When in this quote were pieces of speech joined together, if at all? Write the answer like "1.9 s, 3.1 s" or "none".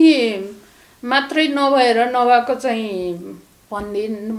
none